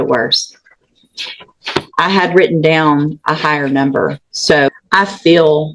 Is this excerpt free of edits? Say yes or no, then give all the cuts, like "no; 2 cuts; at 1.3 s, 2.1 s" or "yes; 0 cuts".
no; 1 cut; at 4.7 s